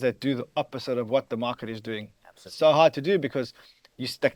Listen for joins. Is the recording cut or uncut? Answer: uncut